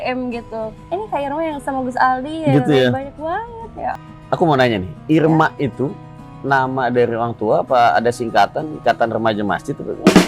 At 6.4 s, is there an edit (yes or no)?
no